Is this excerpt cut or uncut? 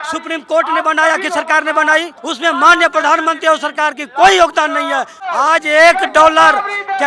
cut